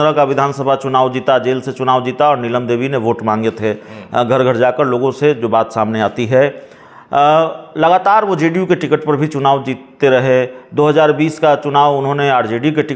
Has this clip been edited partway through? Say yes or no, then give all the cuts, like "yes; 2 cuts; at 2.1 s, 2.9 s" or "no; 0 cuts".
no; 0 cuts